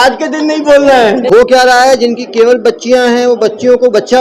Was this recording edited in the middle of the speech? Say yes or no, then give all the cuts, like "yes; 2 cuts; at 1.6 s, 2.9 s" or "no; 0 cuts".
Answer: yes; 1 cut; at 1.2 s